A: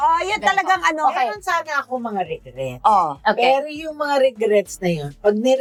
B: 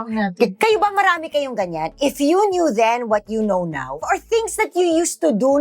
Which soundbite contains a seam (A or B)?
B